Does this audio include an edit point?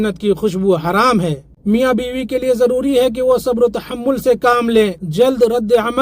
yes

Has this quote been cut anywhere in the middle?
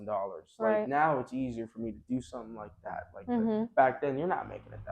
no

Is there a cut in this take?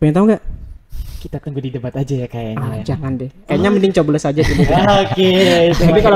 no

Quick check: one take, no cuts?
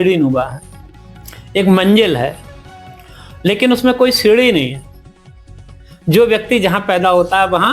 yes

